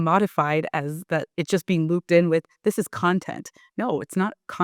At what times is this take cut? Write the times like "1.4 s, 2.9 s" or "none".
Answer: none